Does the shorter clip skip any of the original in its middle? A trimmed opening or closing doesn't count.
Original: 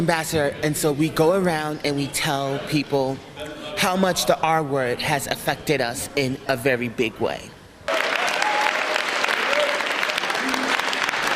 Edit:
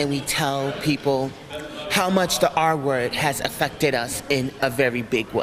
no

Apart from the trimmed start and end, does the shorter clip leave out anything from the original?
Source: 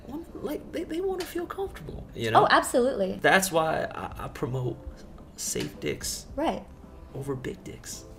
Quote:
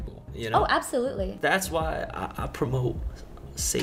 no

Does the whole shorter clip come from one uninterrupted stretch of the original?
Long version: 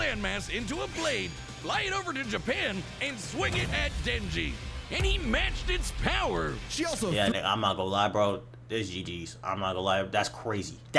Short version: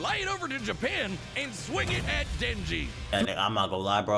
no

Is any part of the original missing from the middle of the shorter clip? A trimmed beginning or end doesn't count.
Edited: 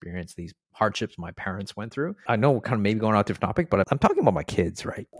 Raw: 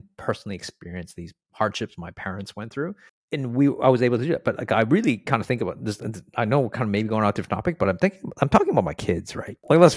yes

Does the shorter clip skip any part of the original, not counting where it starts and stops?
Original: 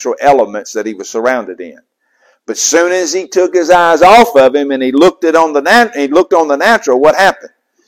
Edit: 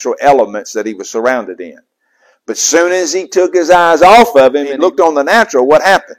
yes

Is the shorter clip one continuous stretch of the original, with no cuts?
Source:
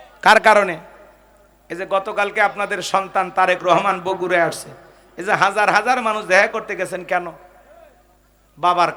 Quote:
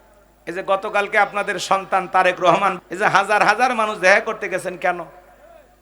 no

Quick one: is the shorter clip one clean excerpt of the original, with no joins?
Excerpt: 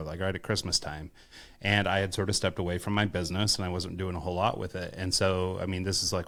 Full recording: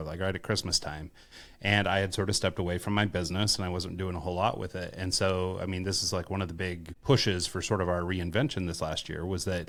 yes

